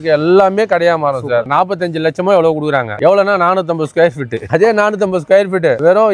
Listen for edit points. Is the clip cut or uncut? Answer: cut